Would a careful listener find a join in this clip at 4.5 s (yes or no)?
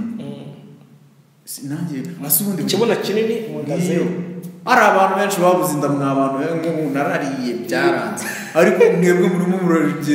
yes